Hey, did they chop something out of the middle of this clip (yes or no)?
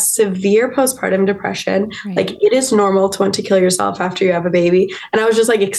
no